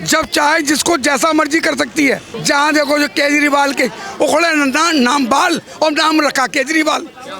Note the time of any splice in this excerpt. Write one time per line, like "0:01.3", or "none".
0:02.3